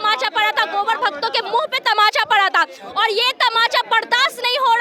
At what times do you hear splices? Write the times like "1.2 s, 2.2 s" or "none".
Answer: none